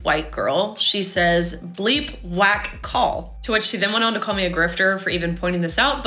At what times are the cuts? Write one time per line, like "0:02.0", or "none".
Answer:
0:03.2